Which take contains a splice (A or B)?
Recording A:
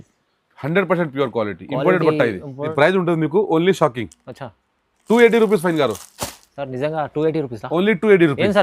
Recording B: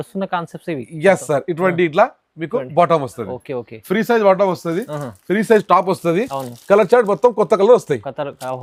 A